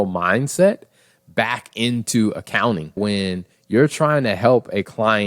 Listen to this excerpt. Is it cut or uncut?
cut